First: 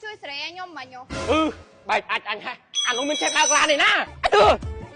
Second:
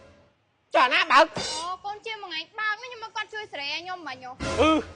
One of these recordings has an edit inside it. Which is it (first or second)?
first